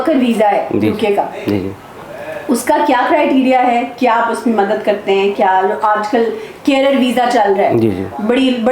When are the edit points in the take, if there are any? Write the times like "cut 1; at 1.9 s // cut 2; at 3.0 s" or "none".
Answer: none